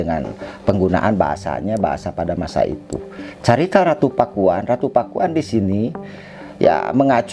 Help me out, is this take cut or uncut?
uncut